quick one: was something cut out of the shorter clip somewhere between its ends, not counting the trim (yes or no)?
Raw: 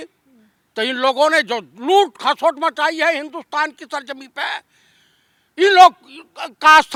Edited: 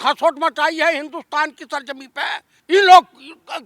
yes